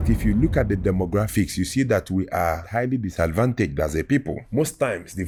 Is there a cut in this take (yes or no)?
no